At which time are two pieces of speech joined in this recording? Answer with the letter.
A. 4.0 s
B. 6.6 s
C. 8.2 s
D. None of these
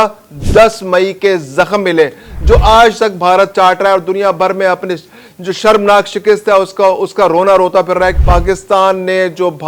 C